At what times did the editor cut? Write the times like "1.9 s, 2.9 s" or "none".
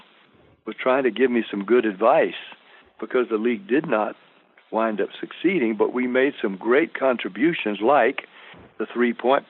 none

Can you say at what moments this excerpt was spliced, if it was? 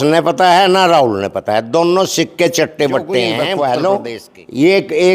3.4 s

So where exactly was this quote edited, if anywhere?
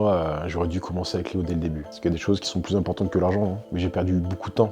1.9 s, 3.7 s

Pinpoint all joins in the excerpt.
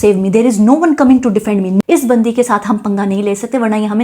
1.8 s

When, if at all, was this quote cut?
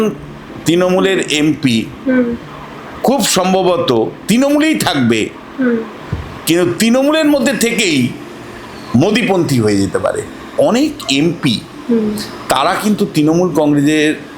10.4 s

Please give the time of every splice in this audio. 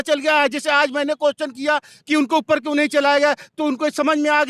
none

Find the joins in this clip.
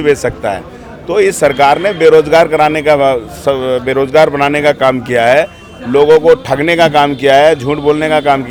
none

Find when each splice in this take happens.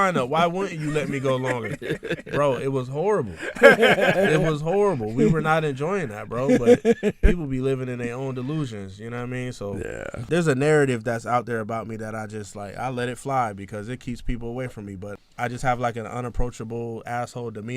10.3 s, 15.2 s

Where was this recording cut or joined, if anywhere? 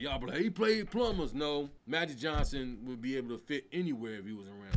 1.8 s

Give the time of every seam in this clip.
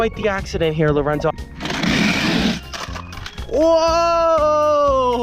1.4 s

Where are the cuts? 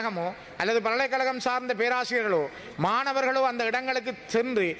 none

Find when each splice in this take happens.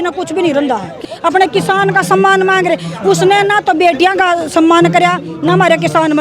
1.0 s

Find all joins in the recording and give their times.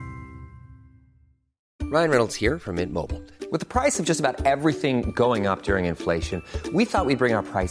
1.6 s

